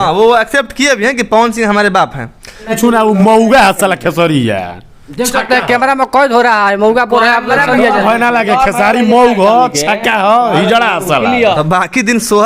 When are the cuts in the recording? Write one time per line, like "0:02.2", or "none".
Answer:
0:02.7
0:11.5